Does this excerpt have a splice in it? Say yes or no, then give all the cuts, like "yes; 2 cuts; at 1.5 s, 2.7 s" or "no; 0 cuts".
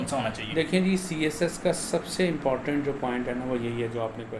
no; 0 cuts